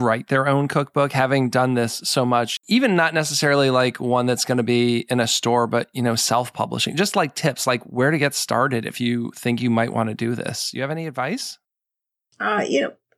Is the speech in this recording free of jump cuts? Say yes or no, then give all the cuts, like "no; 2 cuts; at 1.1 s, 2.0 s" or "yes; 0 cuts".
no; 1 cut; at 2.5 s